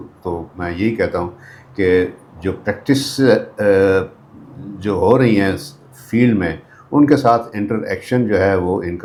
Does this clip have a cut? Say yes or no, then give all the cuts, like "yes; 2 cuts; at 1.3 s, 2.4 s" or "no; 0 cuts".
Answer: no; 0 cuts